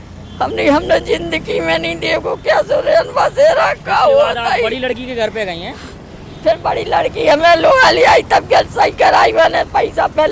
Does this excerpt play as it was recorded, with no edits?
yes; 0 cuts

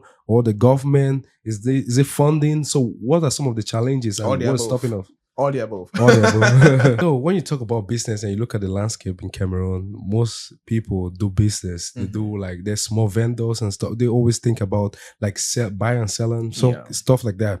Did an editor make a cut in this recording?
yes; 1 cut; at 7.0 s

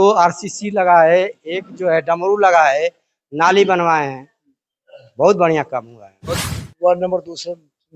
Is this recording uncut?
no; 1 cut; at 6.3 s

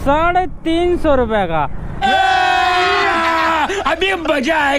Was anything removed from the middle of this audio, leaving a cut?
no; 0 cuts

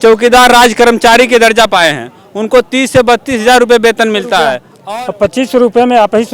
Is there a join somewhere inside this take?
yes; 1 cut; at 4.7 s

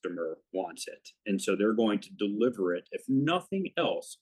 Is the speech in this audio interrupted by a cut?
no; 0 cuts

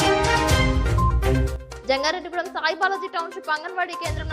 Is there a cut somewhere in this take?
yes; 1 cut; at 1.2 s

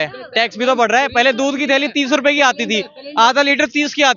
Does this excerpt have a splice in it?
no; 0 cuts

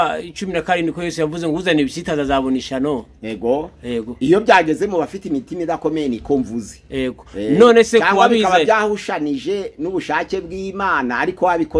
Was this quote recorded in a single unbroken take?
yes; 0 cuts

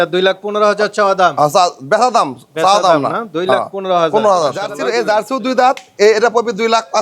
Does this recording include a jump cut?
yes; 1 cut; at 4.8 s

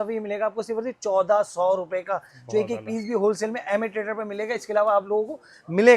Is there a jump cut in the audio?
no; 0 cuts

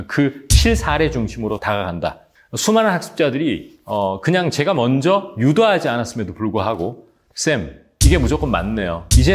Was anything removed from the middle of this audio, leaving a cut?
yes; 1 cut; at 2.2 s

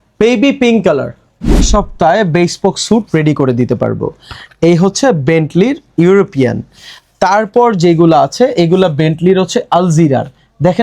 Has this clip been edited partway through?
yes; 1 cut; at 1.6 s

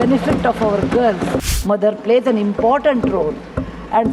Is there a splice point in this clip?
yes; 1 cut; at 1.5 s

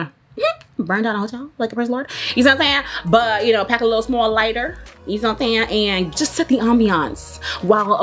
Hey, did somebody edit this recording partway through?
no; 0 cuts

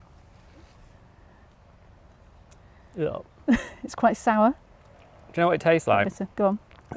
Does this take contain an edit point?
no; 0 cuts

